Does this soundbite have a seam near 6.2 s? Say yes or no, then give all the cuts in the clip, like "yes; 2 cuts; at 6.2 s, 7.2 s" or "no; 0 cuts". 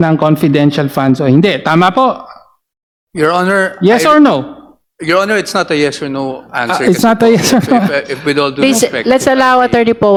no; 0 cuts